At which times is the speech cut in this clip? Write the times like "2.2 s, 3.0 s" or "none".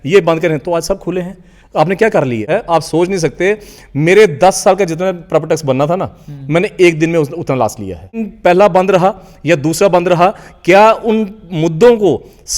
2.5 s, 8.3 s